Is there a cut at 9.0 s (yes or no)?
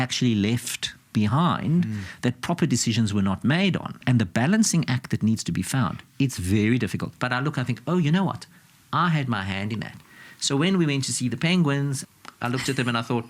no